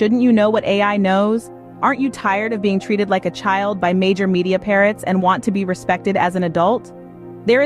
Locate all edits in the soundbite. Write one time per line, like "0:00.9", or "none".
0:02.2